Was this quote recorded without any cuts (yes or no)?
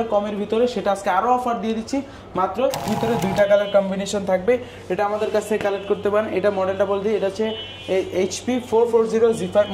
no